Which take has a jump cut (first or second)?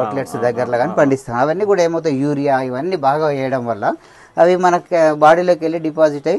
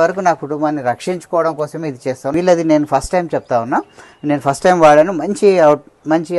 second